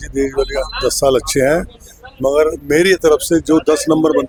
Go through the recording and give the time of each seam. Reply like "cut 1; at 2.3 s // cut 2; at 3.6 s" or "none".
none